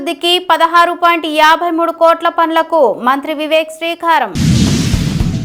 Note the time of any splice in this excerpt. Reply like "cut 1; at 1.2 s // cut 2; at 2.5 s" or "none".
none

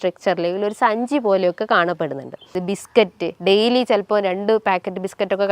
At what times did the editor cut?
cut 1; at 2.6 s

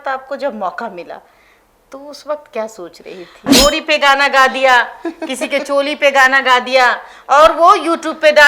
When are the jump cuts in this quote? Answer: cut 1; at 3.5 s

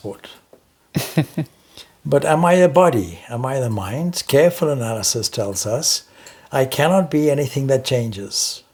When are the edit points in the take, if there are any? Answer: none

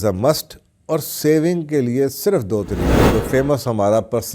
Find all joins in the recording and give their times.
cut 1; at 3.0 s

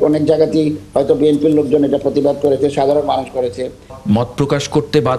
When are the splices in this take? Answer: cut 1; at 3.9 s

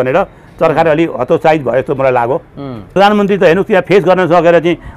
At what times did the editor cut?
cut 1; at 2.8 s

